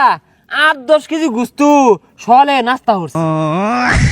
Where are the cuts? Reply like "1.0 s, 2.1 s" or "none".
3.2 s